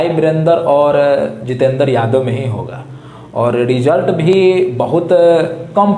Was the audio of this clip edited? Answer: no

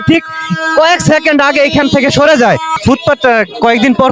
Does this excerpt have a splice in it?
yes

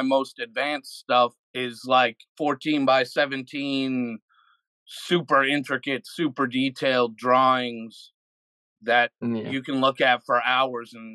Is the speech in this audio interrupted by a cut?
yes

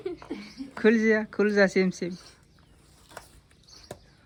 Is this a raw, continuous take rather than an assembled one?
yes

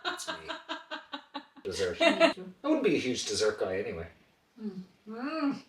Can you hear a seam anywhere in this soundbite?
yes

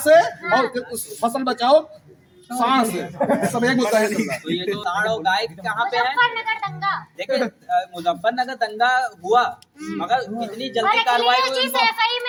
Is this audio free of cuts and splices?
yes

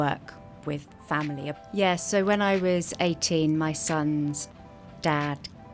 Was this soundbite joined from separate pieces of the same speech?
yes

